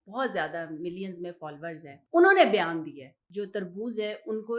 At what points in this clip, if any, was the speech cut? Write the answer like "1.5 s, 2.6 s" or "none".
1.9 s, 3.2 s